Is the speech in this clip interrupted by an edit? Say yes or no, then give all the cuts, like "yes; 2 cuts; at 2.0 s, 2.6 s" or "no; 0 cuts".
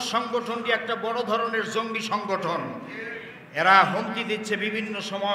no; 0 cuts